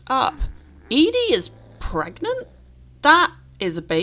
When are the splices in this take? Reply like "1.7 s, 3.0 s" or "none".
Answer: none